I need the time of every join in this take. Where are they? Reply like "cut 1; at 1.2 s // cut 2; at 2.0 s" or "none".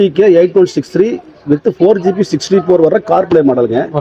none